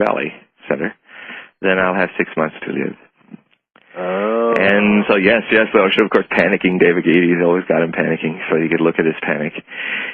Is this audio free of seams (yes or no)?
no